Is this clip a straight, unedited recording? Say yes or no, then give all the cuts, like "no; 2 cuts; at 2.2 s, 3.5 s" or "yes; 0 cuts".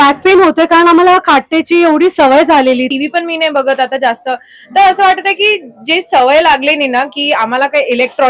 no; 1 cut; at 2.9 s